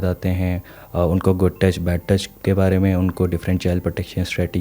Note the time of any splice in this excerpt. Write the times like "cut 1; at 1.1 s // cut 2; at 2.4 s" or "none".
none